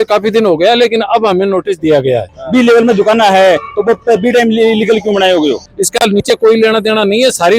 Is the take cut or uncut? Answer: cut